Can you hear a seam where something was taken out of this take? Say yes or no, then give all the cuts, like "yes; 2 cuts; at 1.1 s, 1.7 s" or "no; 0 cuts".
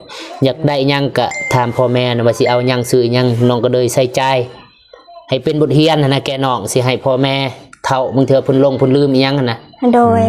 no; 0 cuts